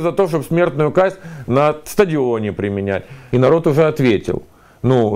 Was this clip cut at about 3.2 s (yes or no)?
yes